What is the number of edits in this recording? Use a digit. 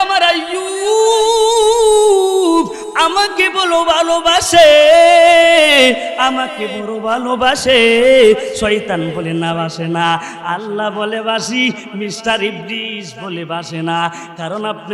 0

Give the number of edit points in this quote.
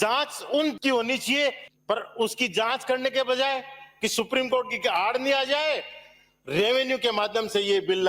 2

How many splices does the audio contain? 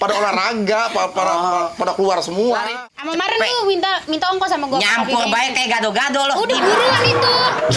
1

